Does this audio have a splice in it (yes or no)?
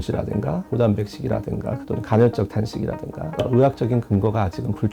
no